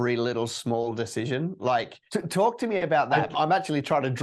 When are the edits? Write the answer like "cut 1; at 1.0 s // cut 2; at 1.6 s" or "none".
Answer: cut 1; at 2.0 s // cut 2; at 3.3 s